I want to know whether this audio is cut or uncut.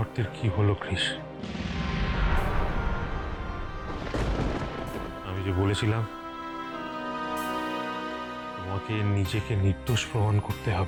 uncut